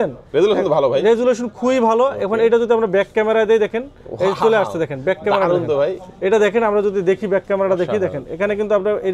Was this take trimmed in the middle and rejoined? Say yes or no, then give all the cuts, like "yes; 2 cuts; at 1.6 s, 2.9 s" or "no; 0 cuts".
no; 0 cuts